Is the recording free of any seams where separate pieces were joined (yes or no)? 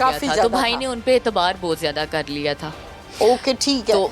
yes